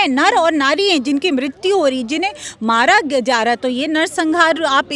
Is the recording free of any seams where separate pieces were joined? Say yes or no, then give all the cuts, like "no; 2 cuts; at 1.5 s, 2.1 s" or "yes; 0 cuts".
yes; 0 cuts